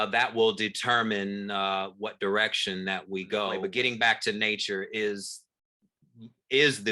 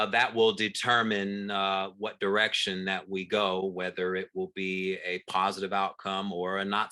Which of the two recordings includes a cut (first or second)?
first